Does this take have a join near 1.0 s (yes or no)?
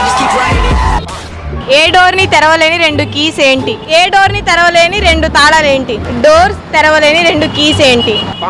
no